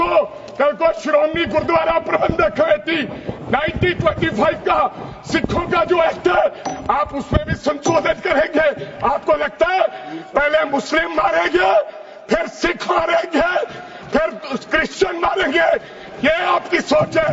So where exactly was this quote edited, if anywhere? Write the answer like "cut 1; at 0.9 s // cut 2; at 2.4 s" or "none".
none